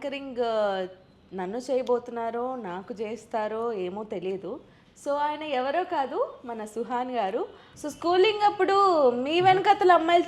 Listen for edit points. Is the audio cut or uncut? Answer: cut